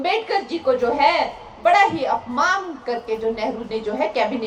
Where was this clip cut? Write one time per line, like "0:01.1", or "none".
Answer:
none